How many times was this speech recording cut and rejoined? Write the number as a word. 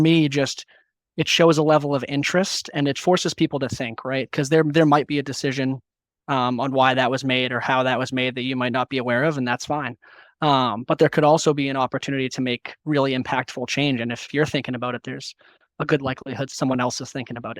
three